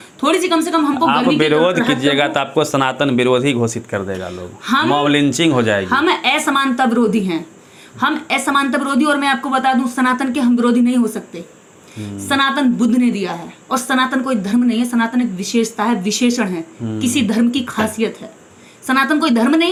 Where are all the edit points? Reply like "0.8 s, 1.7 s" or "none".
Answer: none